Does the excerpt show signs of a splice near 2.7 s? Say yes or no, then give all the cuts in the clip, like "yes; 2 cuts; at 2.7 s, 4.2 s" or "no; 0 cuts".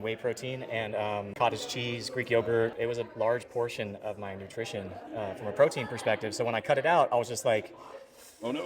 yes; 1 cut; at 2.7 s